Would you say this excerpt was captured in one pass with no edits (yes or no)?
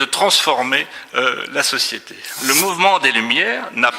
no